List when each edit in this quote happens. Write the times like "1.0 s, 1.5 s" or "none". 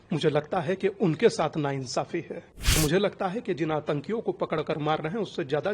2.8 s

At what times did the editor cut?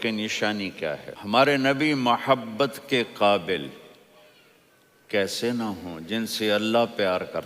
1.1 s

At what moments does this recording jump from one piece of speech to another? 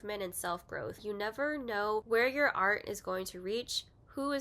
1.0 s

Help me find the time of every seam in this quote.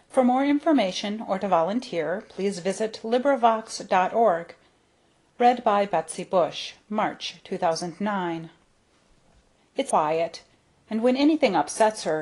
none

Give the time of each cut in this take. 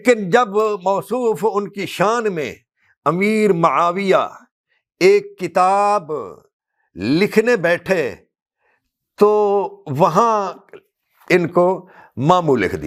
none

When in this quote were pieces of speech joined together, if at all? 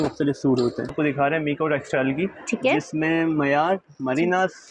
0.9 s

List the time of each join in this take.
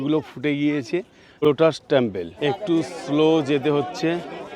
1.2 s, 2.3 s

